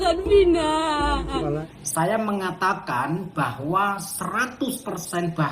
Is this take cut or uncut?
cut